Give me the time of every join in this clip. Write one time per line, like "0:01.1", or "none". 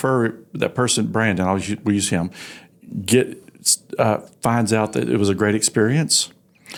none